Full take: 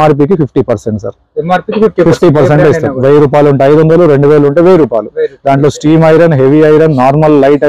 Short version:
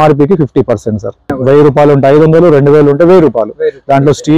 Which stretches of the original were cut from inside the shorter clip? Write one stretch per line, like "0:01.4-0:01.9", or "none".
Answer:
0:01.3-0:02.9